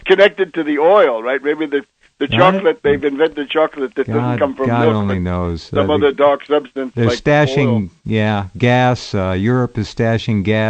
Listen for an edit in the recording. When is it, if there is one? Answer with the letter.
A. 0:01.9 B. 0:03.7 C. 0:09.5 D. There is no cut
C